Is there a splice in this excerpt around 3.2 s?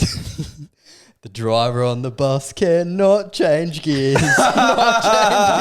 no; 0 cuts

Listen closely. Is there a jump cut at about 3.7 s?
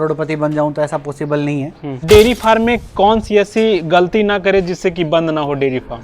no; 1 cut; at 1.9 s

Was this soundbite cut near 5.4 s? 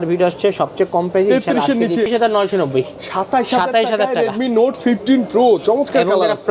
no; 1 cut; at 2.1 s

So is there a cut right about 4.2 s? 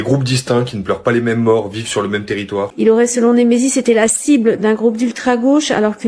no; 1 cut; at 2.6 s

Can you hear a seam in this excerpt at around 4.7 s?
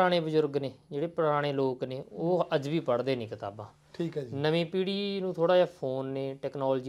no; 0 cuts

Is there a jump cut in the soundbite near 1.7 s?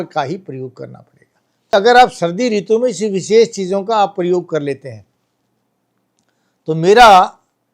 yes; 1 cut; at 1.7 s

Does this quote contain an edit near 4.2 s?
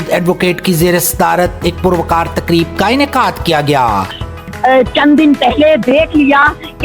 yes; 1 cut; at 4.2 s

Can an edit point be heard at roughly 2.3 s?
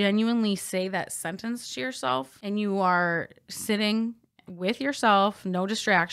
yes; 1 cut; at 2.3 s

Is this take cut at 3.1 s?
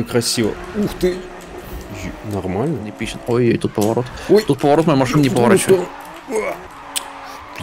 yes; 1 cut; at 3.1 s

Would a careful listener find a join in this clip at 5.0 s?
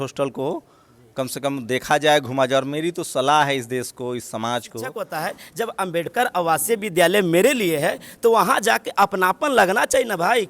yes; 1 cut; at 5.0 s

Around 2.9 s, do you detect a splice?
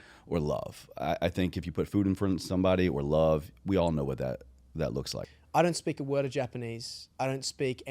no; 1 cut; at 5.2 s

